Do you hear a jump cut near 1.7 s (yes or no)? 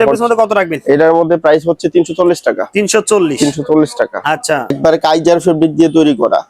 no